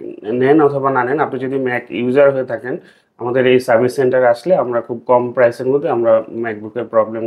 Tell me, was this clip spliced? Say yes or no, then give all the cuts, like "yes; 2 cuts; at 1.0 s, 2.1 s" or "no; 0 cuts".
no; 0 cuts